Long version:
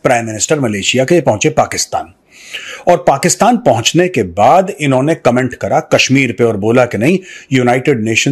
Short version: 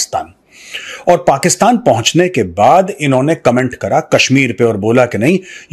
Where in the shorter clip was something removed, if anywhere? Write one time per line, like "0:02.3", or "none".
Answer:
none